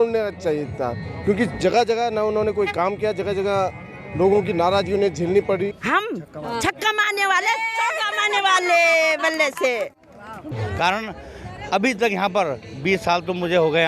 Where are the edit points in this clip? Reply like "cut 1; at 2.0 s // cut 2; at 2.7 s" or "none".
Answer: cut 1; at 5.7 s // cut 2; at 10.5 s

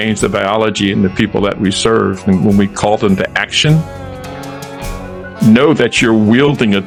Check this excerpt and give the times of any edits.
none

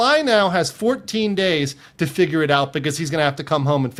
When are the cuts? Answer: none

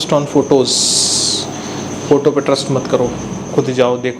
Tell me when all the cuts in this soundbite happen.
none

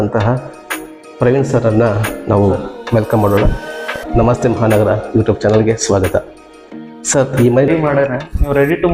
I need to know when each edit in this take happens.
cut 1; at 3.9 s // cut 2; at 7.7 s

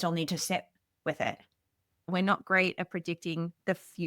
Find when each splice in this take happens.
cut 1; at 2.1 s

